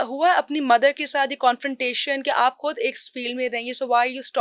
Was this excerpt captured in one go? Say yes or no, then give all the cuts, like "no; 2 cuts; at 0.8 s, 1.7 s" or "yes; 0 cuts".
yes; 0 cuts